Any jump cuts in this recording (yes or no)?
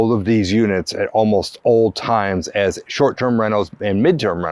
no